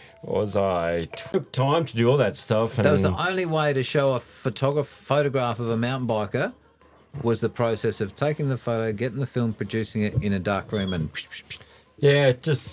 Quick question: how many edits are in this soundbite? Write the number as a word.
one